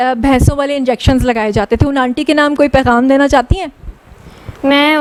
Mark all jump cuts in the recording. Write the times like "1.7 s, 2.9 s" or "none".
none